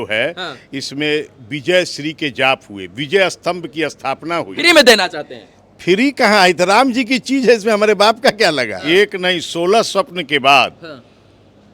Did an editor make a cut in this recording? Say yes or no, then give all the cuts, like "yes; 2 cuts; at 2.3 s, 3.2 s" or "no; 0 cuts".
yes; 2 cuts; at 4.5 s, 8.7 s